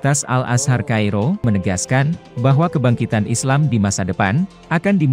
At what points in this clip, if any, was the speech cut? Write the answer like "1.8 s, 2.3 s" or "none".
1.4 s